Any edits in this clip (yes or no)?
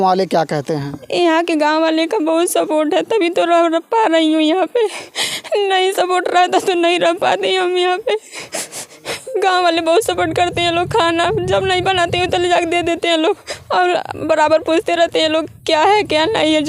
no